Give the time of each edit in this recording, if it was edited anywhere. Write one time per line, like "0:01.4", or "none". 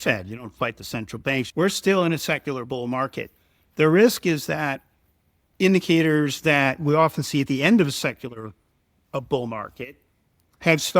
0:01.5